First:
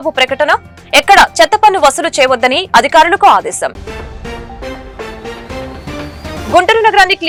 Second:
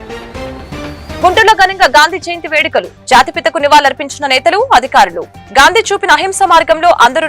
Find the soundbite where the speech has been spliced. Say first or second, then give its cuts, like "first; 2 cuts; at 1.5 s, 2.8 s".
second; 1 cut; at 1.2 s